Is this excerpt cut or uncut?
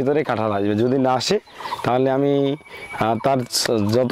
uncut